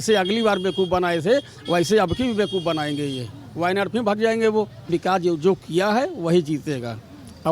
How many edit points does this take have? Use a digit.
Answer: 1